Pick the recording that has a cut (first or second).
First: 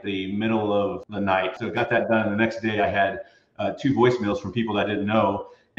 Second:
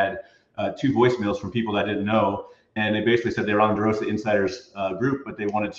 first